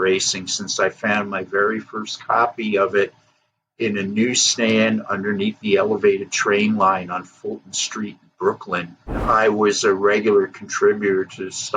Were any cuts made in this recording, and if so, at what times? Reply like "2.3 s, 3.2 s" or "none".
9.2 s

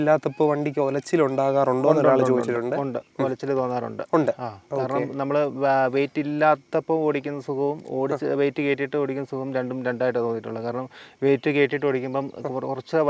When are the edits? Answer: none

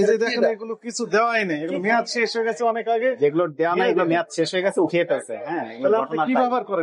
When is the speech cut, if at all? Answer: none

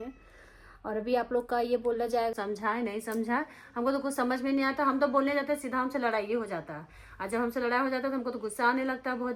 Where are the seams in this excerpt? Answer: 2.3 s

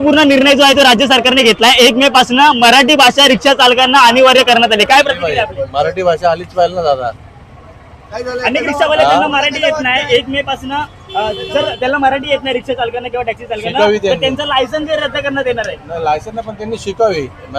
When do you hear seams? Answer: none

